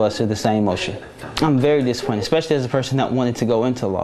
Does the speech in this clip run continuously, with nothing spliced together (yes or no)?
no